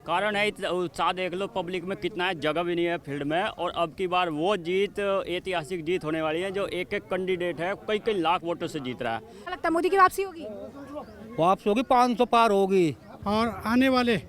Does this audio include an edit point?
yes; 2 cuts; at 9.4 s, 13.1 s

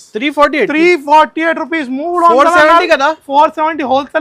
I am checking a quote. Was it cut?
no; 0 cuts

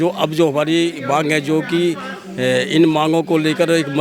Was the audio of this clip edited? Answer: no; 0 cuts

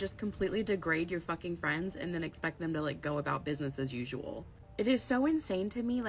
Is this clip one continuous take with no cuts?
no; 1 cut; at 5.2 s

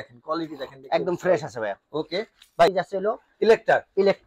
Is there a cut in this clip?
yes; 1 cut; at 2.7 s

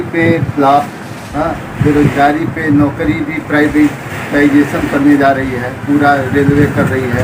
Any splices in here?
no; 0 cuts

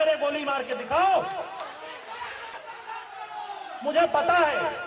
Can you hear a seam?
yes; 1 cut; at 2.5 s

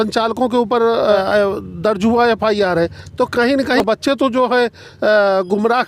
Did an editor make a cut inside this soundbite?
yes; 2 cuts; at 1.2 s, 3.8 s

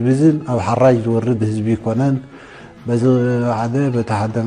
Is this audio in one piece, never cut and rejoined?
no; 1 cut; at 2.3 s

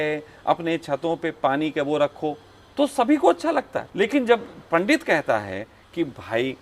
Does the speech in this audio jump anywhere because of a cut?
yes; 1 cut; at 3.8 s

